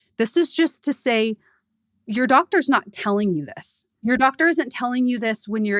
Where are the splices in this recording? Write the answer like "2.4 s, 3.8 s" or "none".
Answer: 3.8 s